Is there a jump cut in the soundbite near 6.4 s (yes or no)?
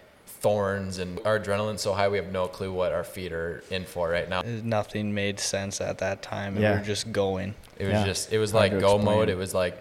no